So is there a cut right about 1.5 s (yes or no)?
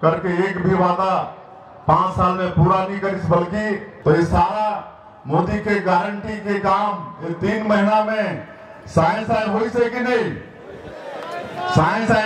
no